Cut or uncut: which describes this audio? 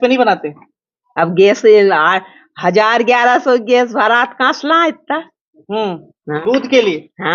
cut